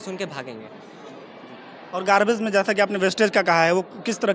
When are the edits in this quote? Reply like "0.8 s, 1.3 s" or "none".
none

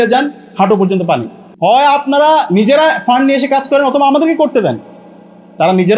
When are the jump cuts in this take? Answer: 1.4 s

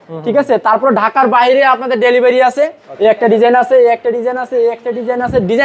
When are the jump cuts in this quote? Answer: 2.8 s

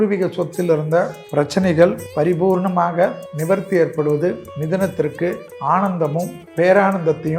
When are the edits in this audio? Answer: 1.2 s, 2.0 s, 3.3 s, 4.5 s, 5.5 s, 6.4 s

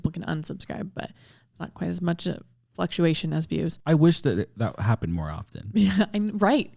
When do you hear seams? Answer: none

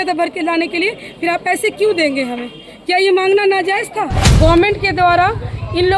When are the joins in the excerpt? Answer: 4.2 s

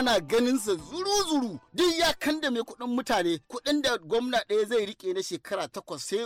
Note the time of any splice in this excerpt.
1.7 s

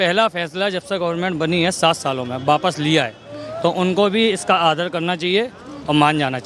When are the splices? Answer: none

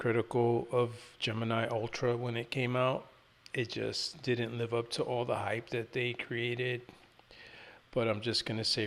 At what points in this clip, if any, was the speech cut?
none

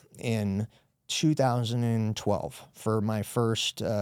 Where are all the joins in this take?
2.7 s

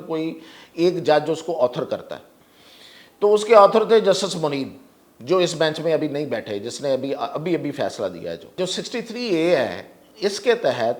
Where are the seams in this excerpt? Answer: 8.6 s

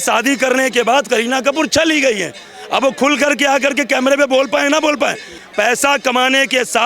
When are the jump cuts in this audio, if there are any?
5.3 s

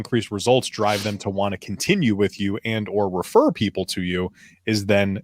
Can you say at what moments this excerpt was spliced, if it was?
none

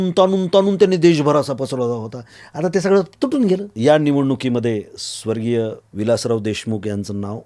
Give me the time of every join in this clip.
3.7 s, 5.8 s

